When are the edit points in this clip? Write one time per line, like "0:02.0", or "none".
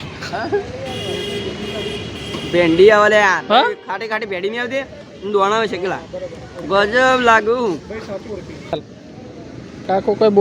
0:08.7